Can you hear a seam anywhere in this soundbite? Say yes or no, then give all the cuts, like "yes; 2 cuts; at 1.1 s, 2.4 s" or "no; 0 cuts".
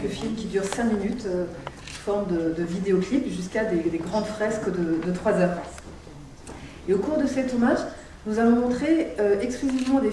yes; 1 cut; at 8.5 s